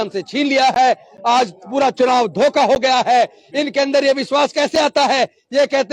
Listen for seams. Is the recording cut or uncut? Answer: uncut